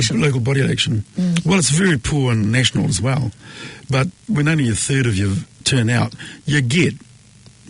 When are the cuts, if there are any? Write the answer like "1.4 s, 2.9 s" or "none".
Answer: 4.2 s, 5.5 s